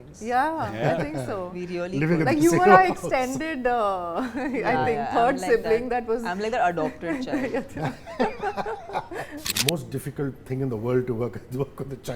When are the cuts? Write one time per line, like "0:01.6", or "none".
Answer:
0:09.5